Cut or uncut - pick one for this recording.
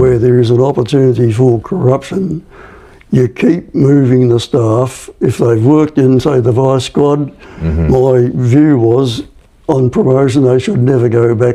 uncut